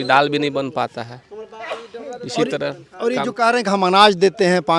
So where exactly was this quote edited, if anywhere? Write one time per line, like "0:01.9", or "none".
none